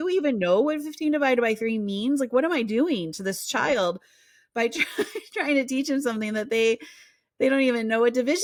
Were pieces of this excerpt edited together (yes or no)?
no